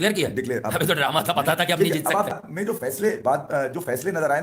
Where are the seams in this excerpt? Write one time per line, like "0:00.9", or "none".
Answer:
0:02.3